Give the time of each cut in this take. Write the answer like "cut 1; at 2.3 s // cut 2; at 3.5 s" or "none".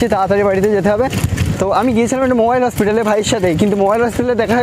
none